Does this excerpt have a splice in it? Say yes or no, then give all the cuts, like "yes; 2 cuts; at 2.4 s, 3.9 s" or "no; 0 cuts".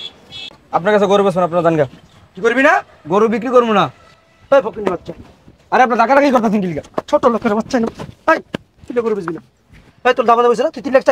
yes; 1 cut; at 4.0 s